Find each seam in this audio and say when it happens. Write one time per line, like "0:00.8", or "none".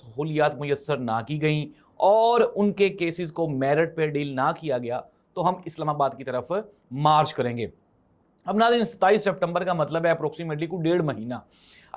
none